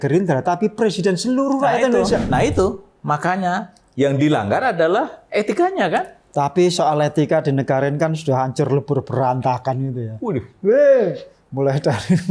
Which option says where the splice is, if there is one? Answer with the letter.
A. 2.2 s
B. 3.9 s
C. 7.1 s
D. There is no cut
A